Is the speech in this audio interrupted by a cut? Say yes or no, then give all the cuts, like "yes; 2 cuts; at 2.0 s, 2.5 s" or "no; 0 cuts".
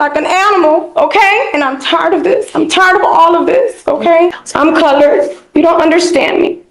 yes; 1 cut; at 4.4 s